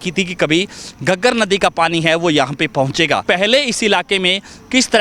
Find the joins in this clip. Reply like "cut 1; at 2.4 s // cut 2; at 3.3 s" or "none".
cut 1; at 3.2 s